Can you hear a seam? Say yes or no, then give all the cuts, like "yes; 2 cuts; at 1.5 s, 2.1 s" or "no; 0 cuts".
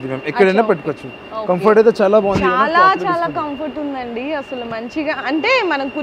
no; 0 cuts